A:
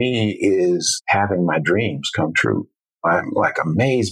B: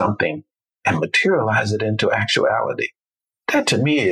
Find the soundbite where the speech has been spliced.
A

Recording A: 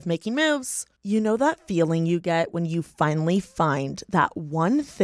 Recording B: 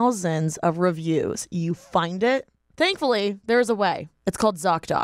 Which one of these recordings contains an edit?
B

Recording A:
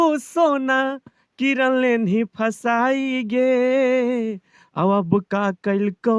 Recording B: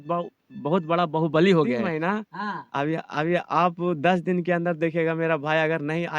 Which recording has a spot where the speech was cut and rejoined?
B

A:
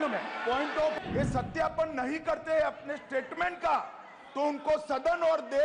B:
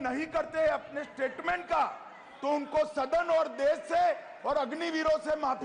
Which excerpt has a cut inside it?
A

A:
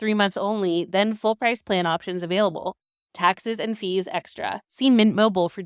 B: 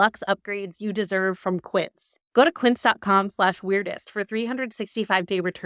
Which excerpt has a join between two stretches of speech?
A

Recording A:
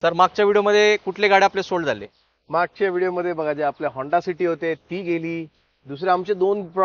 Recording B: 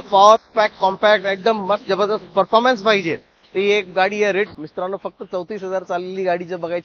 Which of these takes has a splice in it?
B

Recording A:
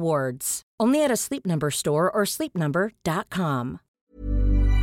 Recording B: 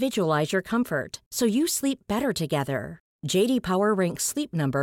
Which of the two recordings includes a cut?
A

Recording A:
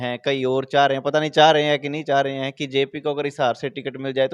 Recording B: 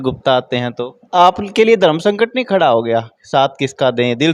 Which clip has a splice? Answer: B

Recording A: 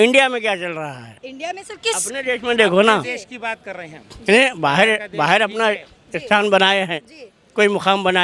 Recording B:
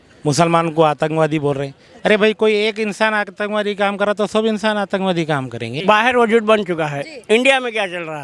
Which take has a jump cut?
B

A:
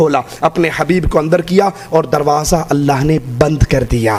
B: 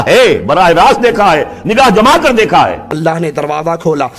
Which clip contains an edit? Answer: B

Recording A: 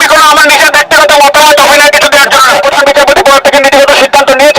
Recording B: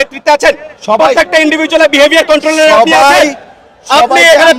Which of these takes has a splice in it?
A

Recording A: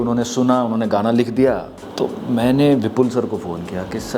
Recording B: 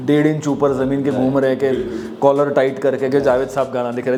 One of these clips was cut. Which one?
A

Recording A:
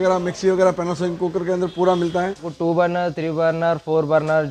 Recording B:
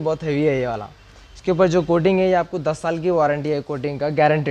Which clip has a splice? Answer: A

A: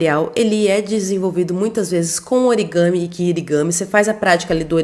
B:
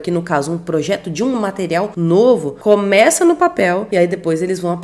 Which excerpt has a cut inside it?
B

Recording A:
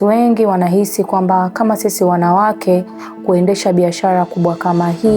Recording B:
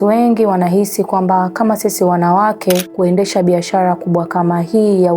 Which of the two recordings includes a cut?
B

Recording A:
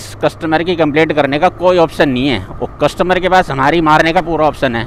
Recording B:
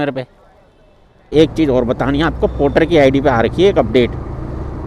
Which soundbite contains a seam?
B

